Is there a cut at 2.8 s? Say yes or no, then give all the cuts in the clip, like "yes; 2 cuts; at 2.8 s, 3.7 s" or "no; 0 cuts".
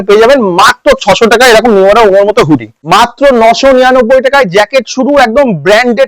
yes; 1 cut; at 2.8 s